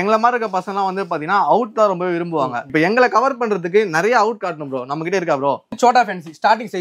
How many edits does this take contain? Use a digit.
2